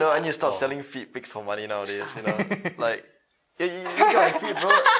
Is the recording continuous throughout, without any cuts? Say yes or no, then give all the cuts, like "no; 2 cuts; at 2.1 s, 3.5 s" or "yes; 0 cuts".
yes; 0 cuts